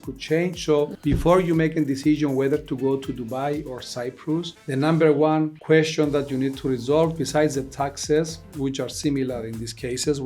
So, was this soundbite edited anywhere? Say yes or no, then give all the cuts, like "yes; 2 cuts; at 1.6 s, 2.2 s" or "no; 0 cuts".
yes; 3 cuts; at 1.1 s, 4.6 s, 5.6 s